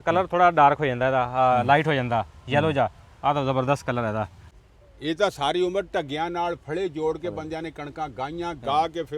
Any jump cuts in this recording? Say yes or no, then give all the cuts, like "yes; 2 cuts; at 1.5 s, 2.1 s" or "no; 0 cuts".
yes; 1 cut; at 4.4 s